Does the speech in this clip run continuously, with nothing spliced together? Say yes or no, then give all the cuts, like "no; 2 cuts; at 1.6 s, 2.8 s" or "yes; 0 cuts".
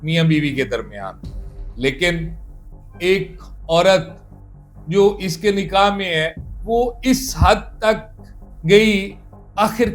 yes; 0 cuts